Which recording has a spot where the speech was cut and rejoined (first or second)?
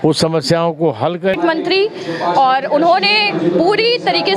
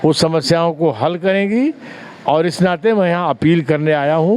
first